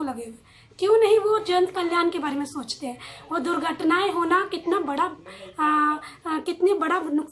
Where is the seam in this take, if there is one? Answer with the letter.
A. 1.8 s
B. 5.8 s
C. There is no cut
C